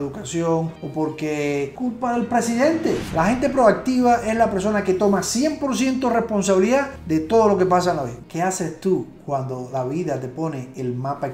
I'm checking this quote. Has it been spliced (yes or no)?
yes